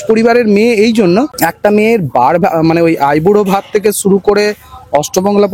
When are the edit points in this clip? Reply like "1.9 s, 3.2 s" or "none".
1.3 s